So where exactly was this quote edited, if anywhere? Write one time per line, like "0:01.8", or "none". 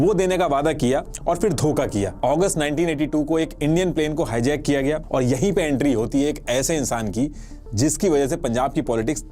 0:02.2
0:05.0